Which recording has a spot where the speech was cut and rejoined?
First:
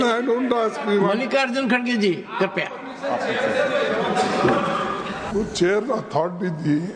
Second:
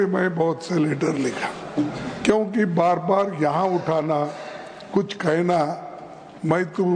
first; 1 cut; at 5.3 s

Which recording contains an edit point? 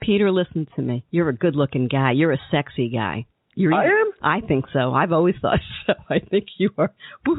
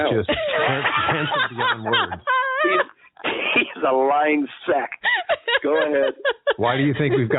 first; 1 cut; at 1.0 s

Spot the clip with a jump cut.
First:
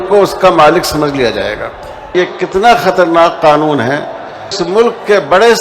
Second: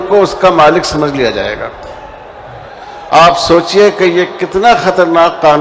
first; 2 cuts; at 2.1 s, 4.6 s

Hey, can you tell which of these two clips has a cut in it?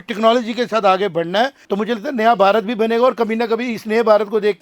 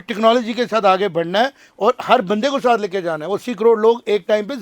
first; 1 cut; at 1.6 s

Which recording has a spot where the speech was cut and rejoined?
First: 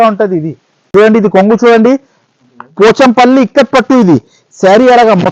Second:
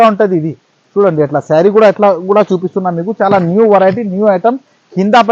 first; 1 cut; at 0.9 s

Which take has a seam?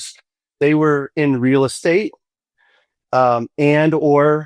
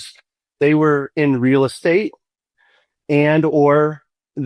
second; 1 cut; at 3.0 s

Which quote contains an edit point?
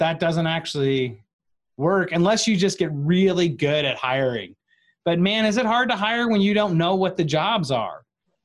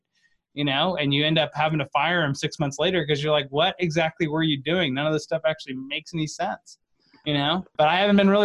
second; 1 cut; at 7.5 s

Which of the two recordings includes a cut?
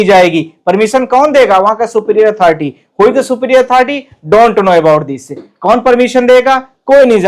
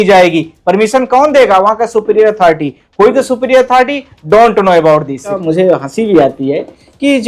second; 1 cut; at 5.4 s

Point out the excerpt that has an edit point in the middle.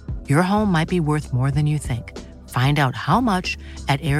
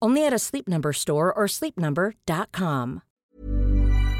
second; 1 cut; at 3.1 s

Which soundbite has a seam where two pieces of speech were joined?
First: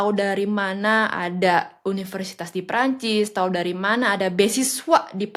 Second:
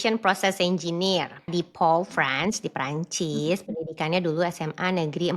second; 1 cut; at 1.5 s

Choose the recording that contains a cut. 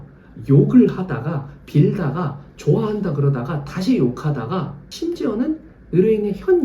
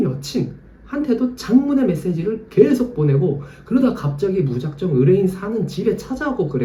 first; 1 cut; at 4.8 s

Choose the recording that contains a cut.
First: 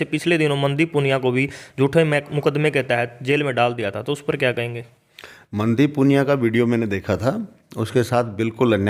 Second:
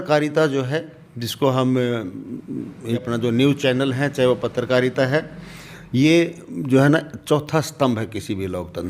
second; 1 cut; at 3.0 s

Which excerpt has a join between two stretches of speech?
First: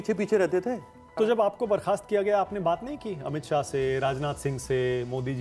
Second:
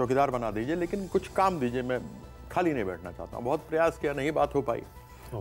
first; 1 cut; at 1.1 s

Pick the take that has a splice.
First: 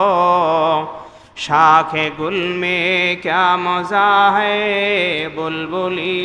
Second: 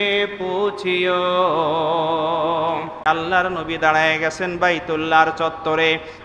second; 1 cut; at 3.0 s

